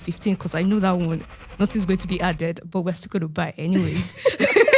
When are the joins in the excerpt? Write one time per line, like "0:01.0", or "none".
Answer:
none